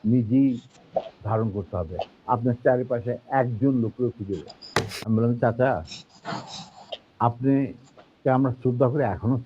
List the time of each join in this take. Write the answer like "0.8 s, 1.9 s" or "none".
4.9 s

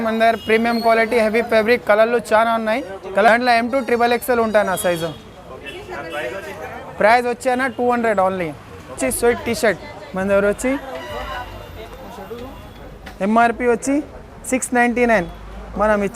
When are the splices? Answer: 3.3 s, 9.0 s

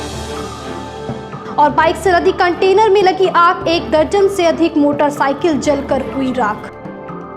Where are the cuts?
none

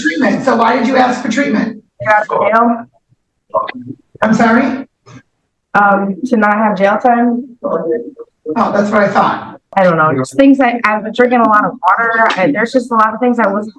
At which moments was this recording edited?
1.9 s, 9.7 s

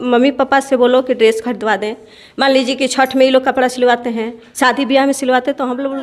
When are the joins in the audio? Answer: none

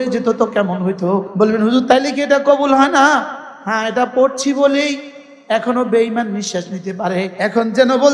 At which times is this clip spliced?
1.3 s, 7.3 s

